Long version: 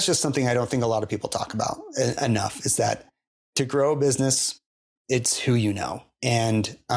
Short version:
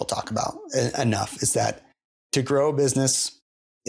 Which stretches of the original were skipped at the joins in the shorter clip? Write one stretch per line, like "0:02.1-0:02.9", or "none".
none